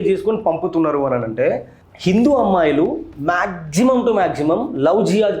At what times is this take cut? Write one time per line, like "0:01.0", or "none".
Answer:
0:01.8